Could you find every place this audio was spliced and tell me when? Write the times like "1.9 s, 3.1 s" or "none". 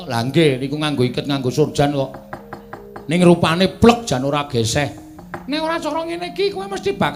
none